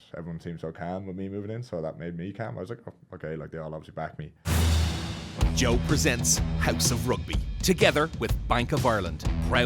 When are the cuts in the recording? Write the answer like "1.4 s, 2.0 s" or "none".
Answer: 4.3 s